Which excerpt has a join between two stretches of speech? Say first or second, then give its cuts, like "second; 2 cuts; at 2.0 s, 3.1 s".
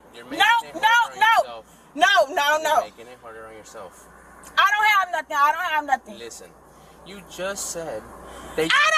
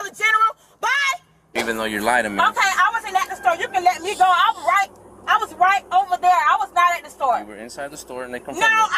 second; 1 cut; at 1.6 s